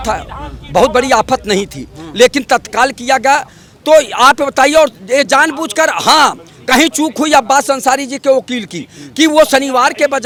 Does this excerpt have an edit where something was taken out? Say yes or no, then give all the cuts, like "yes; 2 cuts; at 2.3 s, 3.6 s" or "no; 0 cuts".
no; 0 cuts